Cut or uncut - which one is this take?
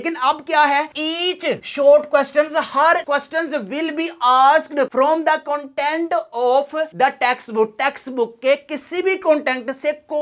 cut